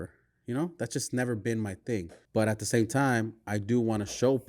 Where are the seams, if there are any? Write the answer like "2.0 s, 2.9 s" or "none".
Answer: 2.2 s